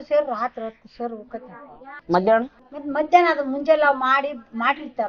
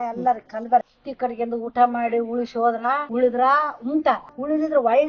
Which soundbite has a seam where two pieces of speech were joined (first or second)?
second